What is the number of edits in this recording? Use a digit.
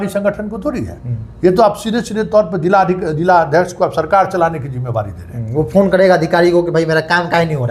0